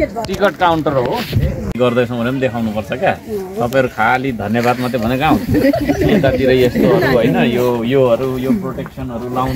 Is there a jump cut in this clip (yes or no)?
yes